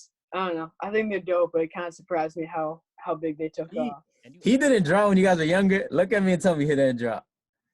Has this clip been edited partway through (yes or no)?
yes